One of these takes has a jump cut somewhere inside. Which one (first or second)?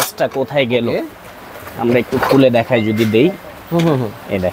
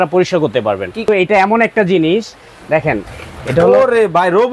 second